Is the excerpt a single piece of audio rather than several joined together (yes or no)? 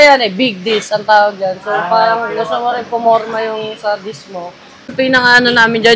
no